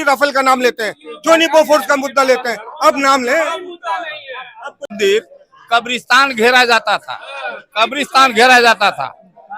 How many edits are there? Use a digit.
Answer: 1